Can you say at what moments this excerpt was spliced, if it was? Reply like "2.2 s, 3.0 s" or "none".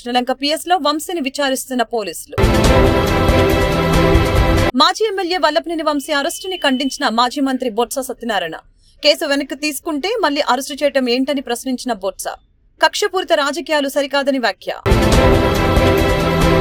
none